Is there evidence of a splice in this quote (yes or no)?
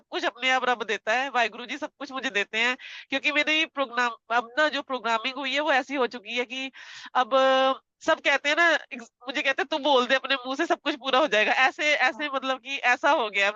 no